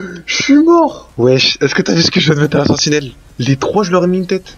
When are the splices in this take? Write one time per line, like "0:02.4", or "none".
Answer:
0:01.0